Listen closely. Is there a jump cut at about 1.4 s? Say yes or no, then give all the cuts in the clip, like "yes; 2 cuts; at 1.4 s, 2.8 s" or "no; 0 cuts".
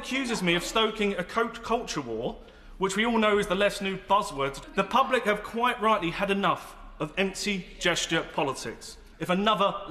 no; 2 cuts; at 4.6 s, 9.0 s